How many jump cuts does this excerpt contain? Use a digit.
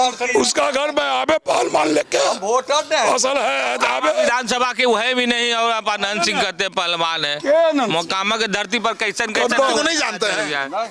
0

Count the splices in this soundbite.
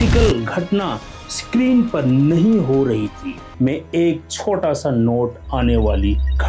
1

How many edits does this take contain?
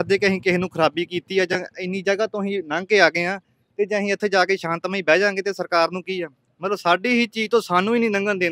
0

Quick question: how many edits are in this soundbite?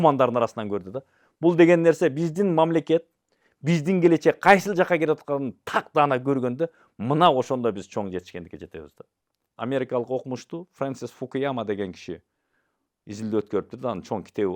1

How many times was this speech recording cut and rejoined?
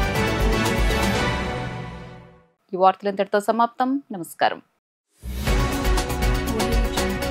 0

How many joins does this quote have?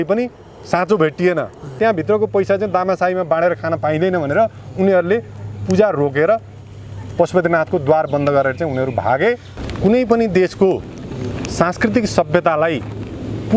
2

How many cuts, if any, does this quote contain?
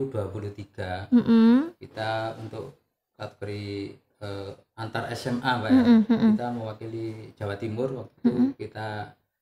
0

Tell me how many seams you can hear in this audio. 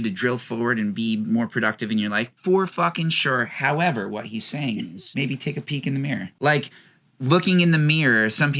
2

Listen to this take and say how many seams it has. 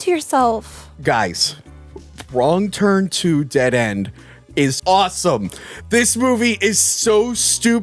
1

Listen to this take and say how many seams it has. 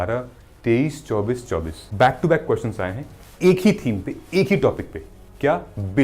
1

